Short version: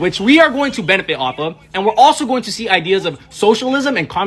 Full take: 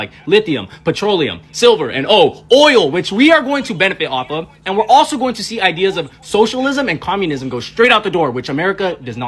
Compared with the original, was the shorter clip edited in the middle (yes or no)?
no